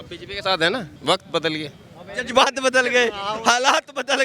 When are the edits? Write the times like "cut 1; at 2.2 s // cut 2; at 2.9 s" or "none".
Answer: cut 1; at 0.9 s